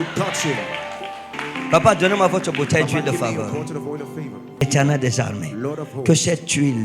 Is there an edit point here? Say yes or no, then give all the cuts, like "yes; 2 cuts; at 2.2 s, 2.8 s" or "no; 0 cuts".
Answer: yes; 1 cut; at 4.6 s